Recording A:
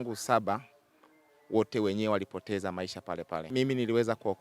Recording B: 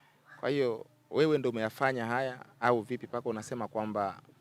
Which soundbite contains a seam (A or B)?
A